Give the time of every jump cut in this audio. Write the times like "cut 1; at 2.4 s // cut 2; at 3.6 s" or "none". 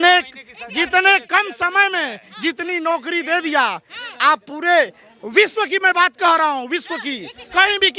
none